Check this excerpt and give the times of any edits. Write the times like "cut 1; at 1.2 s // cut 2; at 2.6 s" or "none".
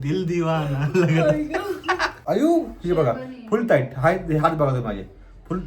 cut 1; at 2.1 s